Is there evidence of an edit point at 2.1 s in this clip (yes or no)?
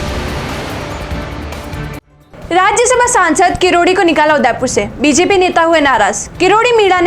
yes